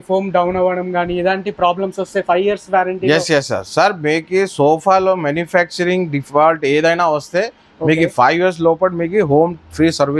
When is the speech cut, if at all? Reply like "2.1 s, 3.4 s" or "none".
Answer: none